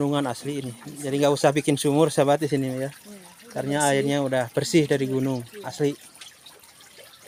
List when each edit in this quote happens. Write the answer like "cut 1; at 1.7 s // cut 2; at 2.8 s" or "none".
none

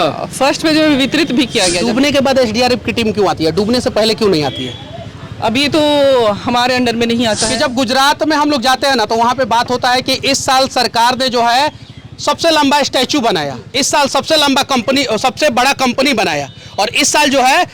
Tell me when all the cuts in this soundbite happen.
cut 1; at 1.8 s // cut 2; at 7.5 s

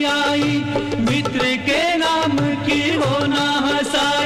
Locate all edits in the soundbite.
none

